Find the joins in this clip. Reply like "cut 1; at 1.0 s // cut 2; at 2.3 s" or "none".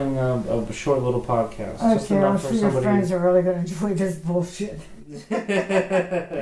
none